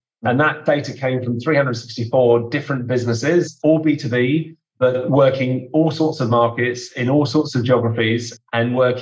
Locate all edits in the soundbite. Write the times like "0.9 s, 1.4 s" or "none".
none